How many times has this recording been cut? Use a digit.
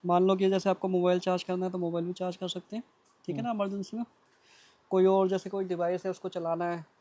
0